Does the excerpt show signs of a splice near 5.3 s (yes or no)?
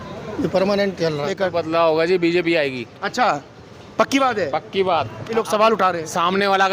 yes